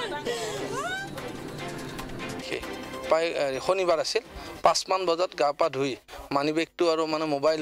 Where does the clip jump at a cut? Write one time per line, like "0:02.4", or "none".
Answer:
0:02.4